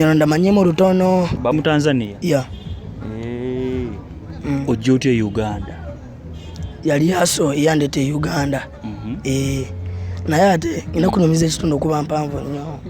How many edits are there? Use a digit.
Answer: 1